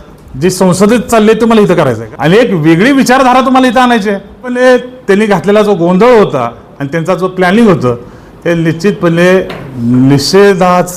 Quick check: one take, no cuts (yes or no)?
no